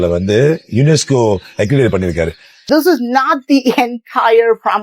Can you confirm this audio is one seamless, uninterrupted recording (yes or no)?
no